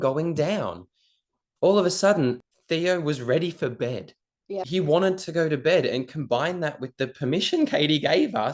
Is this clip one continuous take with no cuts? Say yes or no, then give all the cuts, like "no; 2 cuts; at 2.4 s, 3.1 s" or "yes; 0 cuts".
no; 2 cuts; at 2.4 s, 4.6 s